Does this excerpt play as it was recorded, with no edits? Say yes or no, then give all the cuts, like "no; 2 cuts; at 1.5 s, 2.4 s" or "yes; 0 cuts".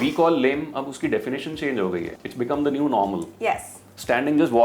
yes; 0 cuts